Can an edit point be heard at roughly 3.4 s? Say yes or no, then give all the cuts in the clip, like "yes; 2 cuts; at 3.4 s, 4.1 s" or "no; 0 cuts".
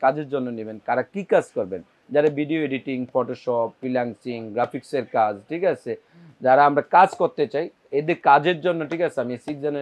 no; 0 cuts